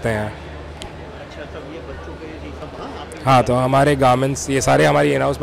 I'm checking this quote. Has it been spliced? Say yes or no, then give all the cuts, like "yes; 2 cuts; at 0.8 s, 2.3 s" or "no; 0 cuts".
no; 0 cuts